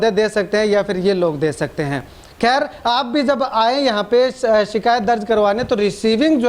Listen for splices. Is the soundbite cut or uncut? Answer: uncut